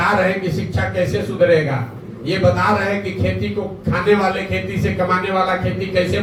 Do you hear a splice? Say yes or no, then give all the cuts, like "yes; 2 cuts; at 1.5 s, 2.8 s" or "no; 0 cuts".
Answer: no; 0 cuts